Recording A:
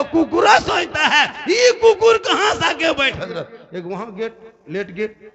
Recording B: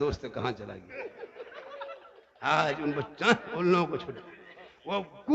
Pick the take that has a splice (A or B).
A